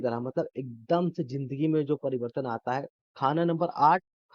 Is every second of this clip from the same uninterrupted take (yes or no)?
no